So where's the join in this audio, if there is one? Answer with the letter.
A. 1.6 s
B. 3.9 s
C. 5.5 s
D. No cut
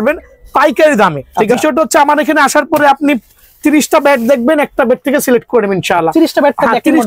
A